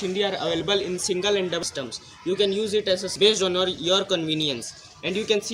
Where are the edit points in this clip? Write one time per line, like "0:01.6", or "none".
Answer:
0:01.6
0:03.1